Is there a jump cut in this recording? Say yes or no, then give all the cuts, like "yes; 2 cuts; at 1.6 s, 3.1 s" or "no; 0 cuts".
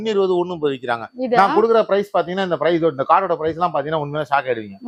no; 0 cuts